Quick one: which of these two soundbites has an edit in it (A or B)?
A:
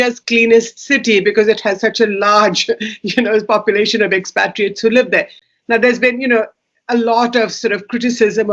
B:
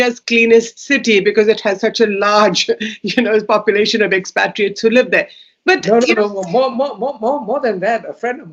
A